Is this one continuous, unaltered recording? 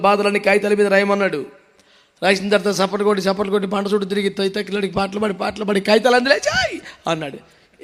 yes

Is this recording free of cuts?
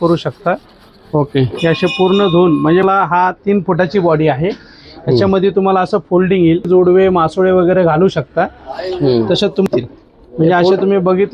no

